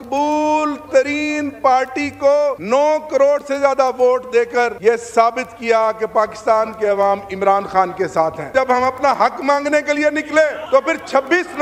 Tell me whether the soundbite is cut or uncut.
cut